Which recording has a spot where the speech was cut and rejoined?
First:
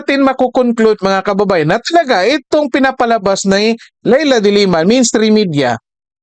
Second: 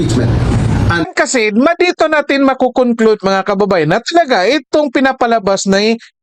second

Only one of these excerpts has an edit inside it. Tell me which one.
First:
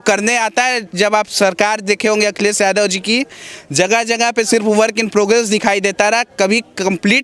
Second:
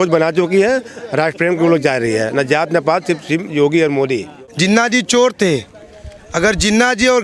second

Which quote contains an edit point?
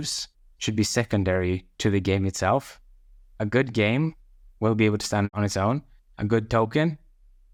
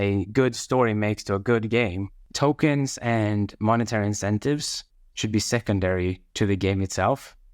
second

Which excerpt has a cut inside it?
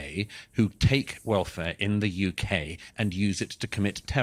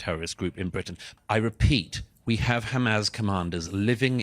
second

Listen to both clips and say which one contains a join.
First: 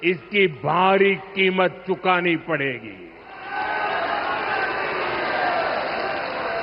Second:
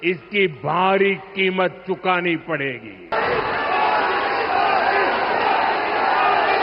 second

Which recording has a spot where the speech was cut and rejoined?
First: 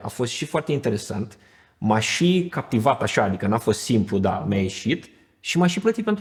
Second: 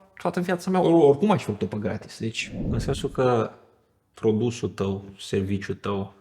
second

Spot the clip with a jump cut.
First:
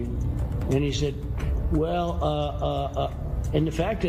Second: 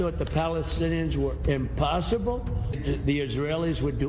second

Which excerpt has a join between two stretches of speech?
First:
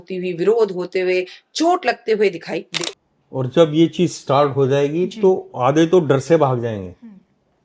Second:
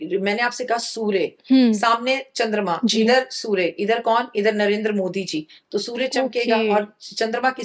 first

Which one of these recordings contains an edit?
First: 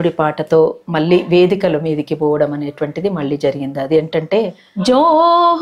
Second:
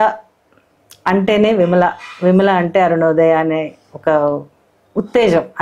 first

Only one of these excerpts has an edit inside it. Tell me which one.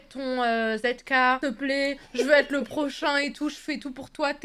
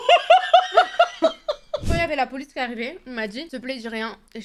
second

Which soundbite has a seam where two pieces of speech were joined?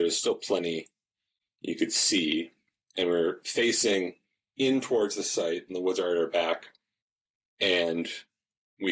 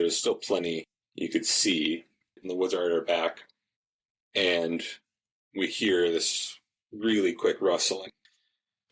second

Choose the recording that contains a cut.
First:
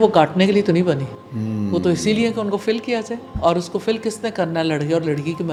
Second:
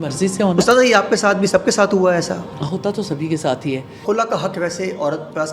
second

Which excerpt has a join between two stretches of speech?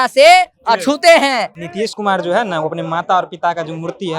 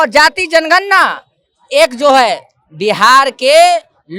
first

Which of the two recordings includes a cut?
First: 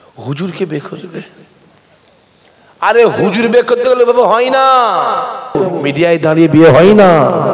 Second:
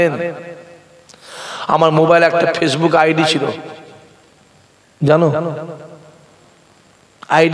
first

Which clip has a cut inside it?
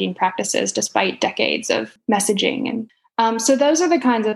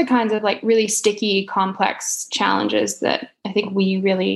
first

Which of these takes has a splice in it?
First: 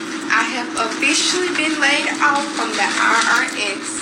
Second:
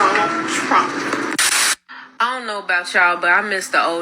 second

